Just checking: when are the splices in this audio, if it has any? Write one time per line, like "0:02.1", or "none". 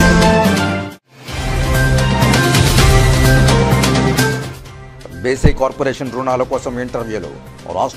none